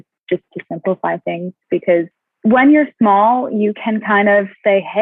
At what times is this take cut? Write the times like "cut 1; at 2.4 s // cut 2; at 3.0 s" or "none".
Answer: cut 1; at 2.2 s